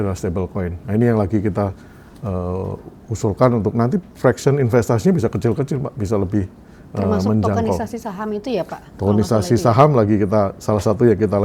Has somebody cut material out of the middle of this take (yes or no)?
no